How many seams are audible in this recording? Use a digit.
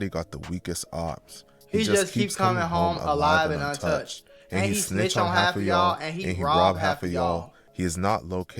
1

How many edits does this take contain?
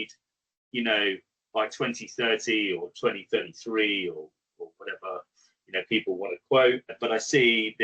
1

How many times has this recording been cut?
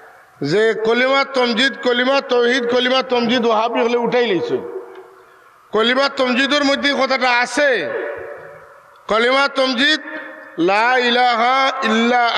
0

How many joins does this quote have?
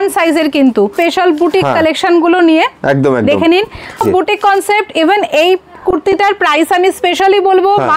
2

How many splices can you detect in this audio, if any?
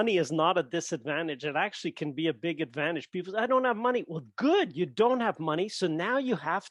0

